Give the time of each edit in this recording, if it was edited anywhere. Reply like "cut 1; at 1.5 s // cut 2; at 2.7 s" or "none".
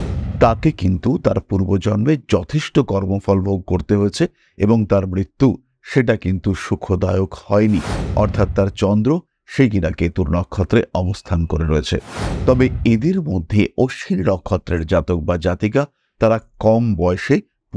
cut 1; at 12.2 s